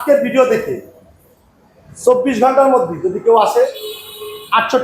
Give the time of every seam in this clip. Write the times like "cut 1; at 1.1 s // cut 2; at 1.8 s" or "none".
none